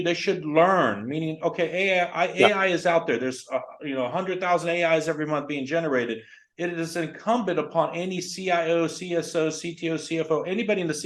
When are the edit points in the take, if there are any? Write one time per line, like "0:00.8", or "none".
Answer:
none